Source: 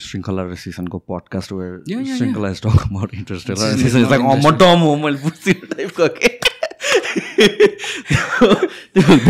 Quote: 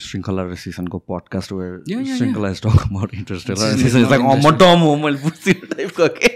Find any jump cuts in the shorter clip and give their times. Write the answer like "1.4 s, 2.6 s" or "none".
none